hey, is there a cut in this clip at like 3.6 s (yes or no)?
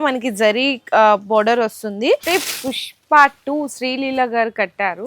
no